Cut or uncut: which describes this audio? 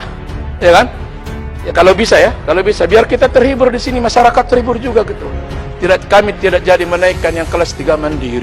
uncut